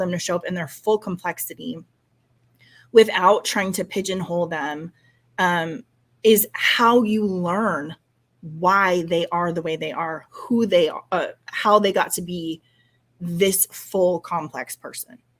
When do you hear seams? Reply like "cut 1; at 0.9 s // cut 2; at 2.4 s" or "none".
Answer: none